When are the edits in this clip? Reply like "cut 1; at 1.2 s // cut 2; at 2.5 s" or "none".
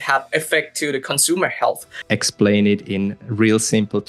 cut 1; at 2.0 s